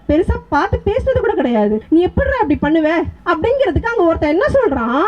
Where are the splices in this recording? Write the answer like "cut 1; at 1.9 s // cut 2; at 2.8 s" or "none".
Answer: cut 1; at 1.8 s // cut 2; at 3.1 s